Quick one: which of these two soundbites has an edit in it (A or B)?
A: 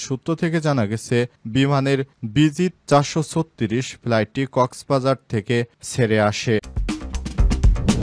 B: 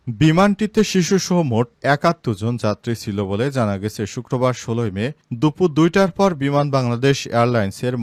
A